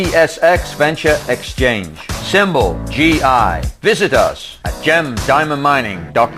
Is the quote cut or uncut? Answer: uncut